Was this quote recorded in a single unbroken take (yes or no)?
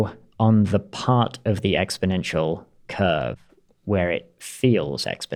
yes